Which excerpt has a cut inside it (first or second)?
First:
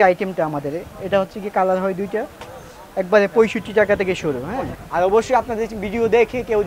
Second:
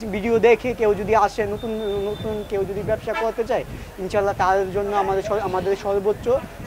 first